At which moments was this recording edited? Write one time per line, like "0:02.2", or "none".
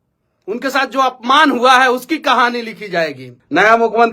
0:03.2